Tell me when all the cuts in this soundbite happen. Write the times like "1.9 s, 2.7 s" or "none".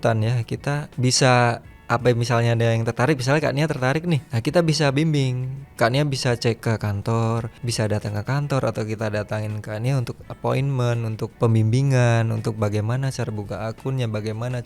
0.9 s, 1.7 s, 4.3 s, 6.6 s, 7.6 s, 11.3 s